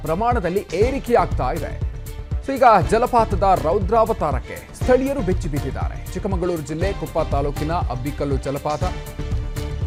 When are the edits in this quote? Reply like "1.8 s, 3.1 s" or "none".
none